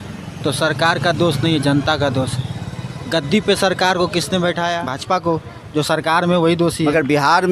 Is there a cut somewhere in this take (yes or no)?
yes